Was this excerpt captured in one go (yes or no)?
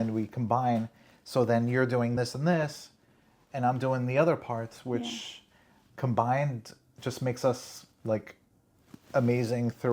yes